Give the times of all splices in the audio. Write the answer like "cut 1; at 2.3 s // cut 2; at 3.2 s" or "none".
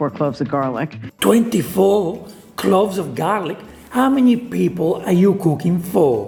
none